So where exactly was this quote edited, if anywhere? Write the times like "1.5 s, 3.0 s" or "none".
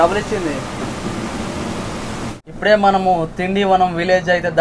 2.4 s